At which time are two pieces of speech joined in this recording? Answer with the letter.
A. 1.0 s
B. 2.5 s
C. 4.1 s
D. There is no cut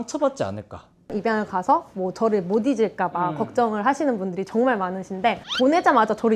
A